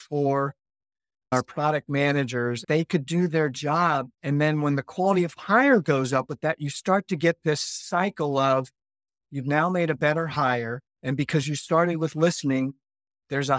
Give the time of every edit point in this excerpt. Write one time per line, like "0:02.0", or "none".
0:01.3
0:02.6
0:04.1